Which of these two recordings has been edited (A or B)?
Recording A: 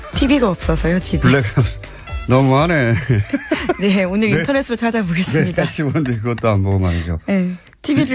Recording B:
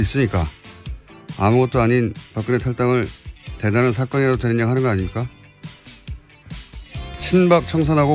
B